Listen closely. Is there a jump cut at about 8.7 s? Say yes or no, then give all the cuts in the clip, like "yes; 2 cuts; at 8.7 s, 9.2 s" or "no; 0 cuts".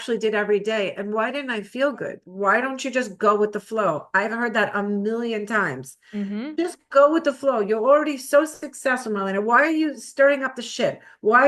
no; 1 cut; at 2.2 s